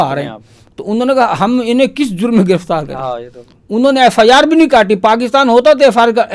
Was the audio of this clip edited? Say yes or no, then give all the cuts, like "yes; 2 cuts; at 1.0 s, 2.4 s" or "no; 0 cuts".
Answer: no; 0 cuts